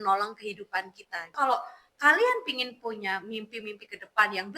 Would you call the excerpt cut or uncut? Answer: cut